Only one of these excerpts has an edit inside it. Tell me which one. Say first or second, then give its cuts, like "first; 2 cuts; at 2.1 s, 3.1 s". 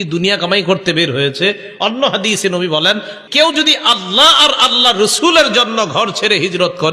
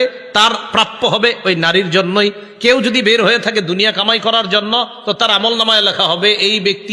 first; 1 cut; at 3.1 s